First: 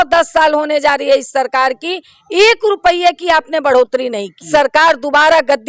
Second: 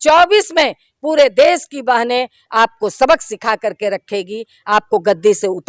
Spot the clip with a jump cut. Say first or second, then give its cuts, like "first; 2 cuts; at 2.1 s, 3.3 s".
first; 1 cut; at 4.5 s